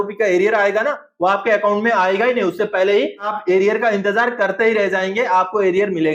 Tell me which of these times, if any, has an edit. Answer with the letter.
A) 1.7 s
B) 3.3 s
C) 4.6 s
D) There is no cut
B